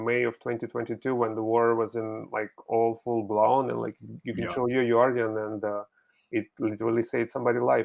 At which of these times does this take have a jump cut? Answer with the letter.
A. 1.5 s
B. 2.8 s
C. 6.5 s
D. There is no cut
D